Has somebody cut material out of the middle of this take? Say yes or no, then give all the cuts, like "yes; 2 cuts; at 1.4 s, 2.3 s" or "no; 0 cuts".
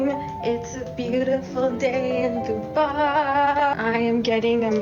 no; 0 cuts